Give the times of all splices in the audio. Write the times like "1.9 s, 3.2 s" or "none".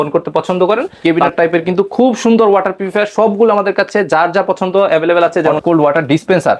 1.0 s, 5.5 s